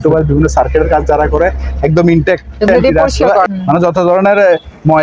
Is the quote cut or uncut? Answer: cut